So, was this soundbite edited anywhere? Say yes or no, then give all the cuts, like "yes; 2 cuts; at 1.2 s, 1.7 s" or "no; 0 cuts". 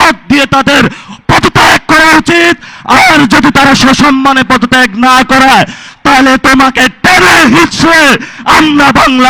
no; 0 cuts